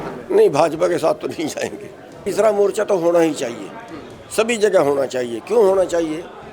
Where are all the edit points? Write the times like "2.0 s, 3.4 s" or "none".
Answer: 2.2 s